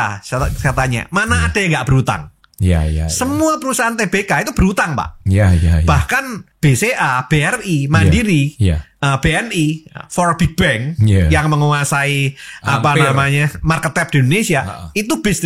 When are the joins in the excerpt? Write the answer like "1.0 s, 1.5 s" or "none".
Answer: 6.4 s